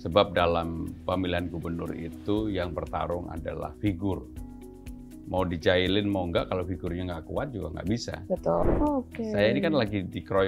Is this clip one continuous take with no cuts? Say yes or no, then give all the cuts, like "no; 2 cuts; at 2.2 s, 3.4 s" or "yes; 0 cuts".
no; 1 cut; at 8.6 s